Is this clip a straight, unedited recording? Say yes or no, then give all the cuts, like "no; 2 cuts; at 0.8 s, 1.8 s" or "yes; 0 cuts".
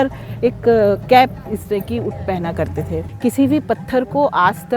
no; 1 cut; at 3.0 s